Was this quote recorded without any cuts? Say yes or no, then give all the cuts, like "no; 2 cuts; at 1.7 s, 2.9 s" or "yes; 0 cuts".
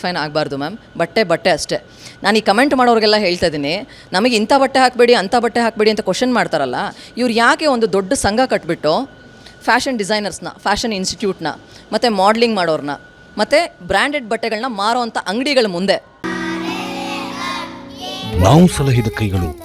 yes; 0 cuts